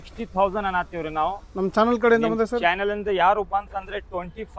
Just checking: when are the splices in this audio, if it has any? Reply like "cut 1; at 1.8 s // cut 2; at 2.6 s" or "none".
none